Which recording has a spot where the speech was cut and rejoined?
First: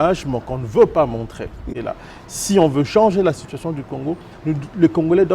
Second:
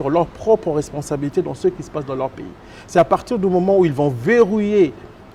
first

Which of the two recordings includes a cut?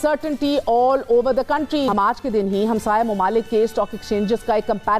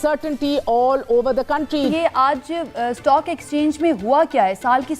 second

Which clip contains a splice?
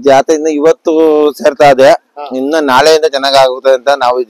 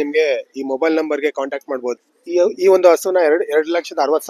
second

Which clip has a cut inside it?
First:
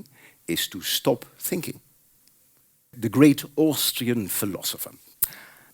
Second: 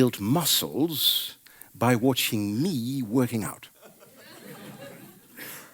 first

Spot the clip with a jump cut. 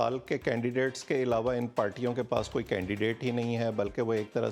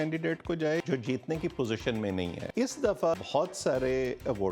second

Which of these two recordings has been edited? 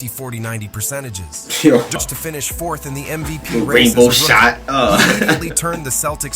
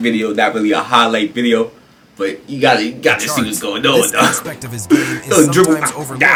first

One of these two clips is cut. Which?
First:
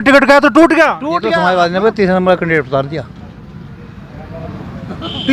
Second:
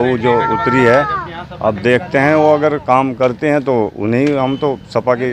first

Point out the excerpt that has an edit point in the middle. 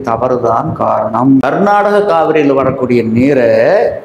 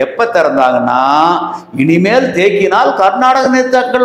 first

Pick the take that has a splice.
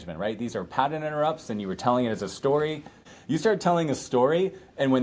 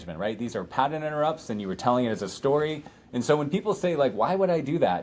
first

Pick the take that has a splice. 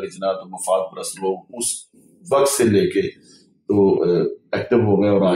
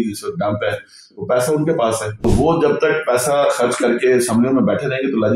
second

